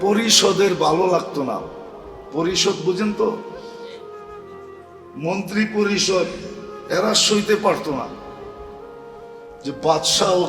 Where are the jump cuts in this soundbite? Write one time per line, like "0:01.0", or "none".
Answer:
0:03.4
0:05.1